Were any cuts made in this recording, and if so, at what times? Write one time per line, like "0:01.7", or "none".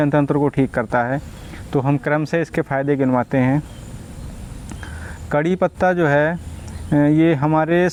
none